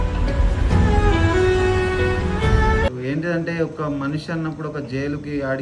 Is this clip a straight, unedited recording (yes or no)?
no